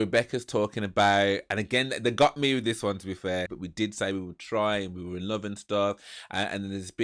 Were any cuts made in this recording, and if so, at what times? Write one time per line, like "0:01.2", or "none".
0:03.6